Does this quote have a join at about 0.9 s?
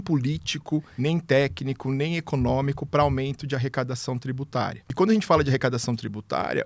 yes; 2 cuts; at 0.9 s, 4.8 s

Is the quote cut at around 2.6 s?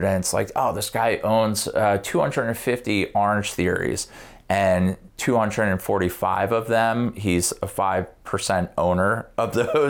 no; 0 cuts

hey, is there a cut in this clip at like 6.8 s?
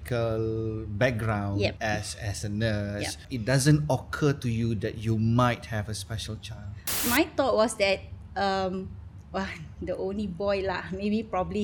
yes; 3 cuts; at 1.8 s, 3.2 s, 6.8 s

